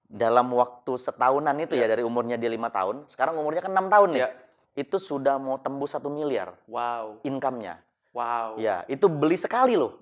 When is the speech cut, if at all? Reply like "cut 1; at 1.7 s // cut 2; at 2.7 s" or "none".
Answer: none